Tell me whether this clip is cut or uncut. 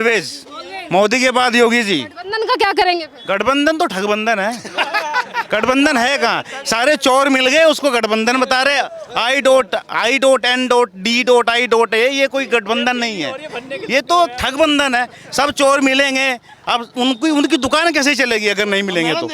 uncut